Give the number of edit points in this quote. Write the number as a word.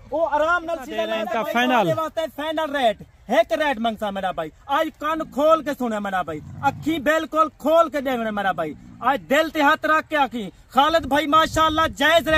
one